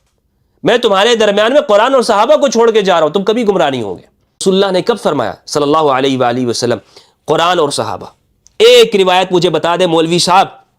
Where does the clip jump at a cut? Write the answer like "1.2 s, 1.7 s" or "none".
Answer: 4.4 s